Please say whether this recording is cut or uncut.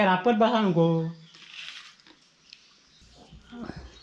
cut